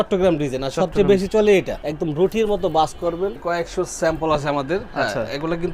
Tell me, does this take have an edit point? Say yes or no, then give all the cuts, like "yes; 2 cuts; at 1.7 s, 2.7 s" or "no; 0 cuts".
yes; 2 cuts; at 1.8 s, 3.4 s